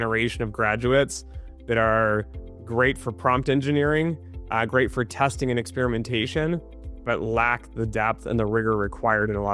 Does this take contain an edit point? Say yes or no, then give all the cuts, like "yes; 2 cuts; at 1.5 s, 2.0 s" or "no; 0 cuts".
no; 0 cuts